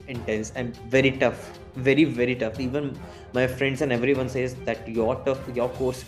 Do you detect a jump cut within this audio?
no; 0 cuts

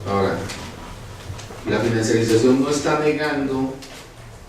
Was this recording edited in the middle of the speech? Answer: yes; 1 cut; at 1.0 s

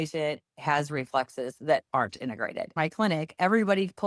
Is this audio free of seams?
no; 1 cut; at 2.7 s

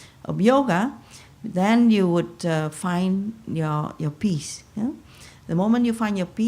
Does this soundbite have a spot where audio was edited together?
yes; 1 cut; at 4.8 s

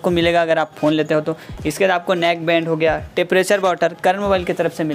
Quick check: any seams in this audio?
no; 0 cuts

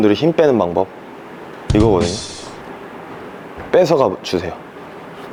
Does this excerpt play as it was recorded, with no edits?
yes; 0 cuts

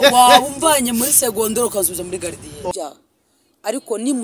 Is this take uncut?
no; 1 cut; at 2.7 s

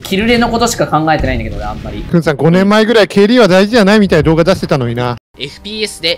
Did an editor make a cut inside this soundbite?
yes; 1 cut; at 1.9 s

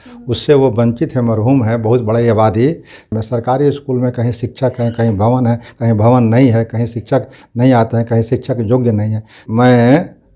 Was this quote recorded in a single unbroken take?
no; 2 cuts; at 3.0 s, 9.4 s

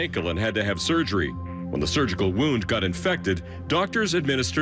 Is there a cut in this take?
no; 0 cuts

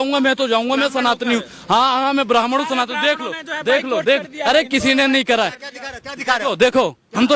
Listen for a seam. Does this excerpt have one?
no; 0 cuts

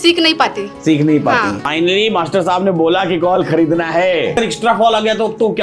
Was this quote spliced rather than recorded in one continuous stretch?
yes; 2 cuts; at 1.7 s, 4.4 s

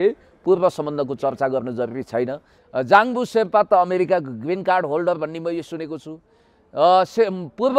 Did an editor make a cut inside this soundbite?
yes; 1 cut; at 2.5 s

